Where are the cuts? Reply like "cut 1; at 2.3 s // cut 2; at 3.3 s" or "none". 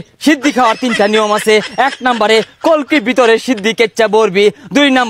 none